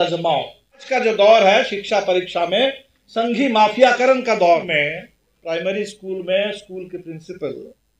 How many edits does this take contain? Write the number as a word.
two